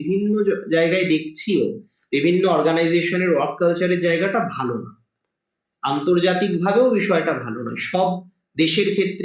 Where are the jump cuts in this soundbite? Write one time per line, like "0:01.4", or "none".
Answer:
none